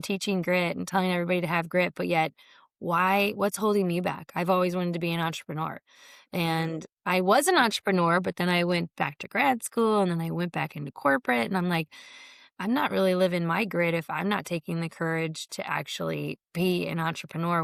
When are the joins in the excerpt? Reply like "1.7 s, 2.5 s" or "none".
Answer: none